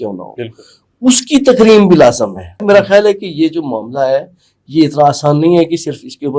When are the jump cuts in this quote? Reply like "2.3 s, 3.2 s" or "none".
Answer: 2.5 s